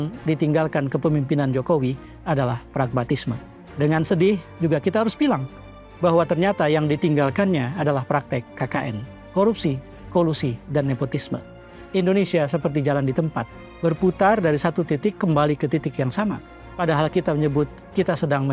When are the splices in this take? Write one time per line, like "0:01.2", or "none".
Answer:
none